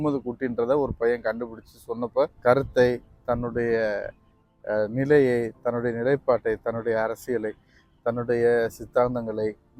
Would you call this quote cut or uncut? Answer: cut